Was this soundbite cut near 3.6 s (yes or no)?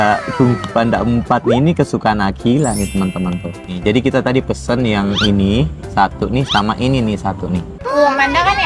no